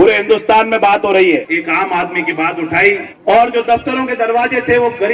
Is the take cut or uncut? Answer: cut